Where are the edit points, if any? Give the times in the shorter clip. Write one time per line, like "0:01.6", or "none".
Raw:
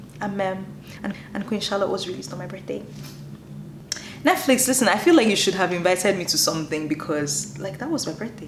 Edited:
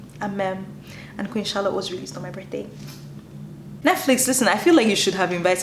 0:01.0
0:03.7

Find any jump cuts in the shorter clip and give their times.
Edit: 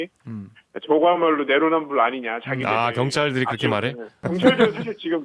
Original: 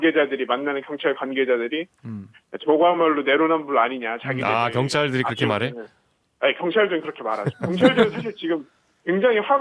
0:04.2

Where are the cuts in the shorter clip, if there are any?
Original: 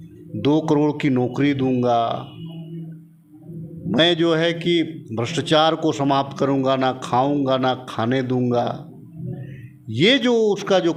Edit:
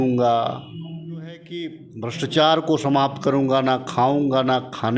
0:01.8

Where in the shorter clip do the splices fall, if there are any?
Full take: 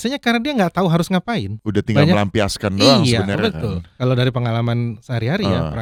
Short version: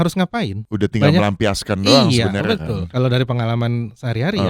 0:02.9

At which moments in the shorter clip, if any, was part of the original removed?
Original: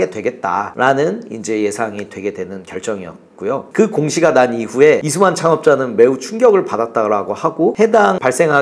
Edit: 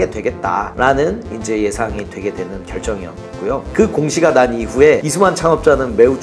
none

